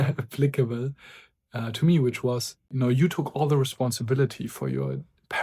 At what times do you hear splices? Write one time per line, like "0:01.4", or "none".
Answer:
0:02.6